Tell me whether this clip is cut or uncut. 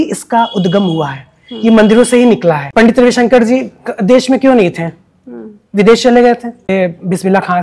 cut